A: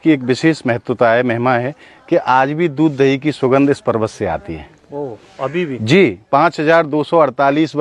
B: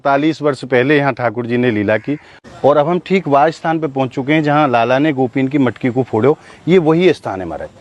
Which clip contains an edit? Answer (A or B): B